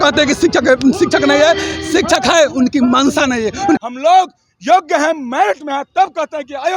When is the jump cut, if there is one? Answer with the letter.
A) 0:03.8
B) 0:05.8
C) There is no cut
A